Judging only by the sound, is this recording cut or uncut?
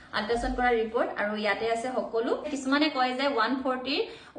cut